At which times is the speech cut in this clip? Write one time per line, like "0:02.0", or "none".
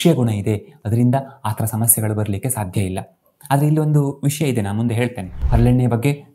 0:05.3